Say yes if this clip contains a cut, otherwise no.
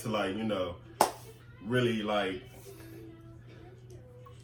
no